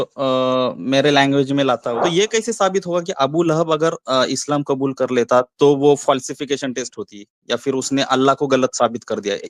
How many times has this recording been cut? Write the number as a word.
one